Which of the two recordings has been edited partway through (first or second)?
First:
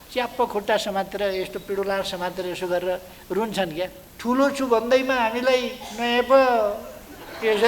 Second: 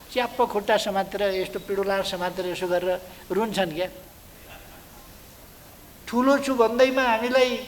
first